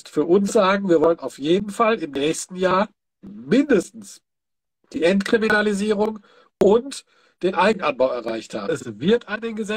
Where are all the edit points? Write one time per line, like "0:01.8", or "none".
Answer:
0:08.7